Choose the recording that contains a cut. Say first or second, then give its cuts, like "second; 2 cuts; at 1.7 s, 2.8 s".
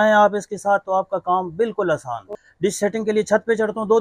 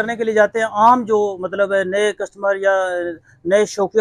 first; 1 cut; at 2.3 s